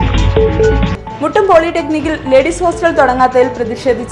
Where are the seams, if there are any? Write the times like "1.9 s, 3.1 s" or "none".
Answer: 0.9 s